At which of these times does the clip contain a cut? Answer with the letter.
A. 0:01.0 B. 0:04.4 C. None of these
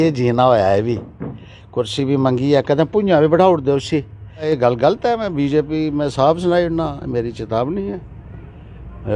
B